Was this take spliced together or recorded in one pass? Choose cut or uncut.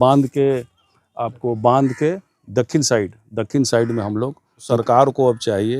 cut